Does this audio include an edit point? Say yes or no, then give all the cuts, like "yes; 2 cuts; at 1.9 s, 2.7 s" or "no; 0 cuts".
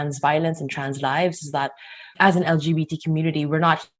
yes; 1 cut; at 2.1 s